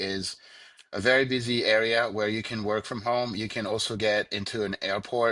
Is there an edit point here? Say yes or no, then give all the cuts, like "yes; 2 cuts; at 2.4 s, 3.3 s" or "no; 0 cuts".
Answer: no; 0 cuts